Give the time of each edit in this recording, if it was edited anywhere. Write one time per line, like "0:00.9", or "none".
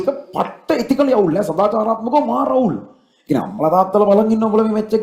none